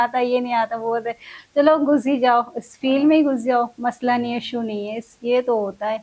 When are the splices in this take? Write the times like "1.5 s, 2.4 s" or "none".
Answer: none